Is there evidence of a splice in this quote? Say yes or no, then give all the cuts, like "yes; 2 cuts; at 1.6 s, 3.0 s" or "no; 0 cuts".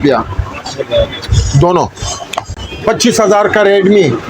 yes; 1 cut; at 2.6 s